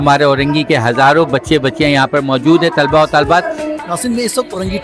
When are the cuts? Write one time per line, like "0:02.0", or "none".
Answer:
0:03.7